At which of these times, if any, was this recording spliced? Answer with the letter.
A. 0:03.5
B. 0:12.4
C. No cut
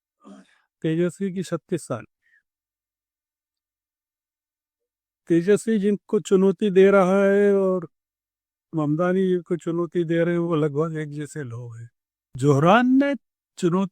B